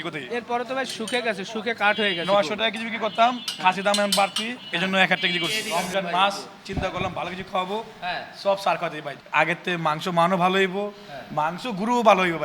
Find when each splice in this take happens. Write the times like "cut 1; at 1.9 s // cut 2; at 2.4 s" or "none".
cut 1; at 5.6 s // cut 2; at 9.1 s